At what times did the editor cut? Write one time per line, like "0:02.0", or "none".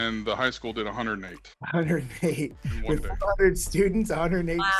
none